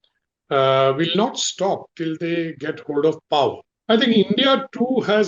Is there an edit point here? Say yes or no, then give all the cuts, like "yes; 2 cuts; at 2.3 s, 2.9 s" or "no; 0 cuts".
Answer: yes; 1 cut; at 3.7 s